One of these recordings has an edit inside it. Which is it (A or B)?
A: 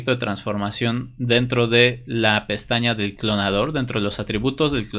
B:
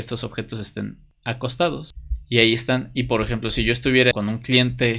B